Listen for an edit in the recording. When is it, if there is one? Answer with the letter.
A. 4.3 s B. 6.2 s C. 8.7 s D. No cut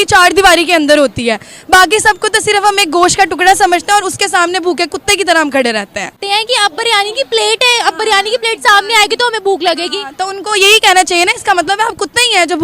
B